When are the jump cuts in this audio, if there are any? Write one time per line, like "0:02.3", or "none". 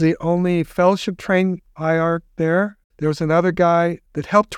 0:02.3